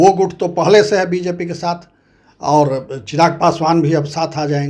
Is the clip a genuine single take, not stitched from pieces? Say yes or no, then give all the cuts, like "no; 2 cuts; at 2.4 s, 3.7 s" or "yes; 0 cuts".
yes; 0 cuts